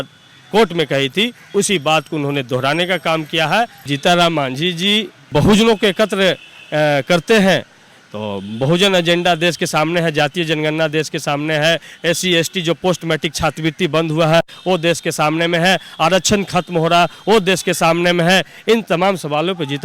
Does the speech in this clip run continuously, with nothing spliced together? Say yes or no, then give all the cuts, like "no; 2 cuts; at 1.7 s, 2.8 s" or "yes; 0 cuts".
no; 3 cuts; at 3.8 s, 5.3 s, 11.9 s